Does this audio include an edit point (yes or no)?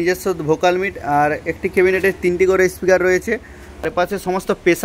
yes